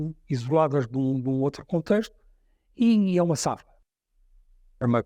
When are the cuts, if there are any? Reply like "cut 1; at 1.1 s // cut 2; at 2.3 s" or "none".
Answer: cut 1; at 3.7 s